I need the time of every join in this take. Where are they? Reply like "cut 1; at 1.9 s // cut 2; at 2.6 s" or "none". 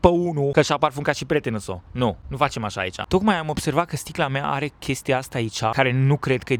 none